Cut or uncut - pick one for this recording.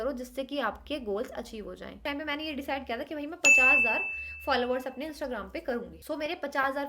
cut